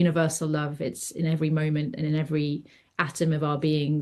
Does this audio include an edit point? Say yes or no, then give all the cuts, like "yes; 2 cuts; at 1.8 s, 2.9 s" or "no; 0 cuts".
no; 0 cuts